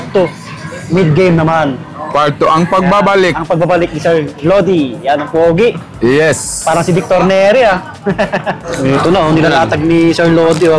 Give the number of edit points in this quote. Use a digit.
1